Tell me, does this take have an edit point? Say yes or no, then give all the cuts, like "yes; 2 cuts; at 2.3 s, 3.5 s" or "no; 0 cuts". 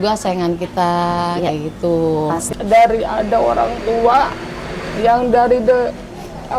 yes; 1 cut; at 2.5 s